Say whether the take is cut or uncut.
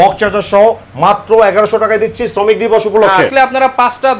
cut